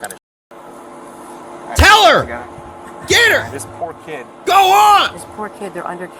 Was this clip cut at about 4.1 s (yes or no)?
no